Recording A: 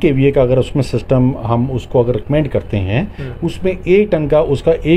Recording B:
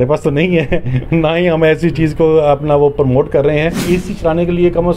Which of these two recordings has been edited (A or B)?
B